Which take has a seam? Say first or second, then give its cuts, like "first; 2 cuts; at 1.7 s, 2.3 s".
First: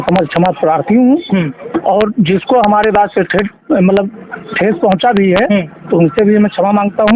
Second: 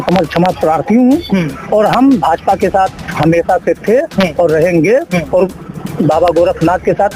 second; 1 cut; at 1.6 s